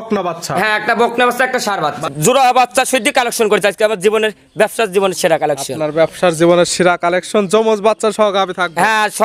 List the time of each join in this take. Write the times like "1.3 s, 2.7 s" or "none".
2.0 s

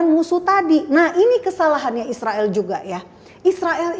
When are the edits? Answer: none

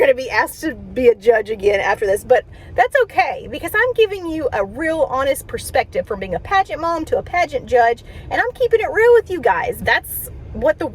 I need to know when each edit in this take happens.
9.8 s

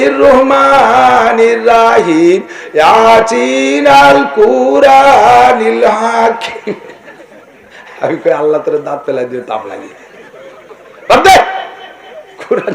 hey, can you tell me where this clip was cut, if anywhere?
none

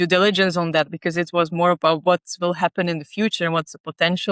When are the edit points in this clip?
none

